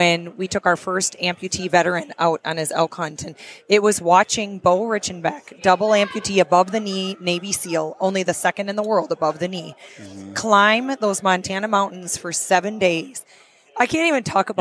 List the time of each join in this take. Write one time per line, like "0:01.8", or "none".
none

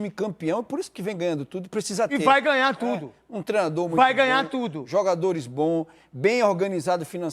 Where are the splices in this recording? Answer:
none

